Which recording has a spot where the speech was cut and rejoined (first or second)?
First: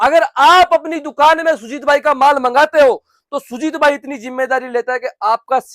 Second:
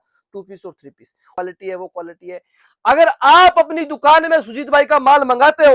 second